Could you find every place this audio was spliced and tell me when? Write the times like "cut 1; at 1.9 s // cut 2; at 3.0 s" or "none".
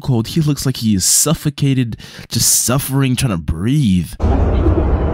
cut 1; at 4.2 s